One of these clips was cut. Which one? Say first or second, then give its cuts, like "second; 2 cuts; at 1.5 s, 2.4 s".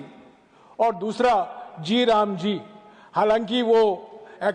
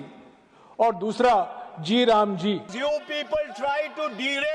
second; 1 cut; at 2.7 s